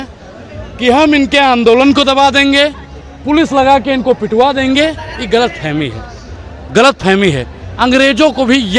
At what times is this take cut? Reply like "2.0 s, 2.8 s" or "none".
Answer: none